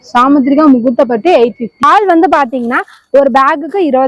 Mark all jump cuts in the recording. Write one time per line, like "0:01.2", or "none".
0:01.8

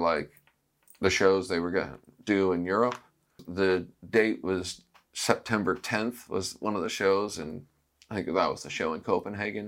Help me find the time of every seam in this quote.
0:03.4

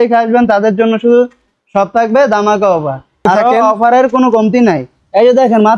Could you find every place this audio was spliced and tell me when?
0:03.2

